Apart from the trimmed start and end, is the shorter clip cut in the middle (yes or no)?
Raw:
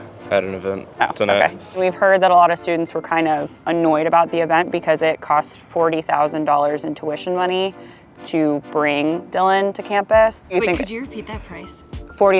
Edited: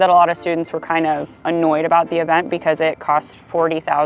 no